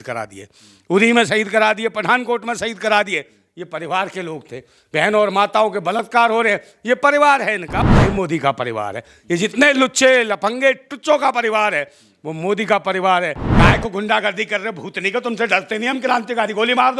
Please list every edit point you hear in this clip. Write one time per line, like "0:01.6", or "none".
0:07.8
0:13.4